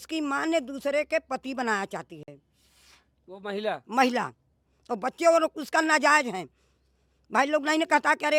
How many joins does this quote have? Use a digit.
0